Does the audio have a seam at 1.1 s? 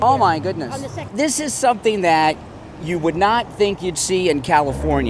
yes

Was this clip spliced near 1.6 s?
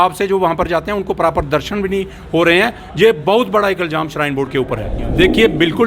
no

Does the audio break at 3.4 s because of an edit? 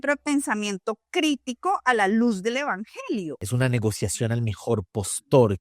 yes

